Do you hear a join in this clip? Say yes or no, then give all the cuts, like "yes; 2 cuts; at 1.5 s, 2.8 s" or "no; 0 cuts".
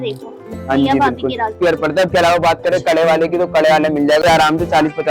yes; 2 cuts; at 1.5 s, 4.2 s